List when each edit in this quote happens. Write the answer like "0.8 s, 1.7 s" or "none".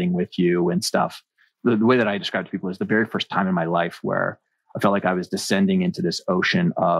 1.5 s